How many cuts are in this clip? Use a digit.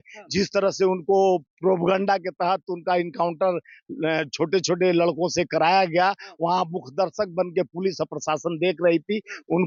0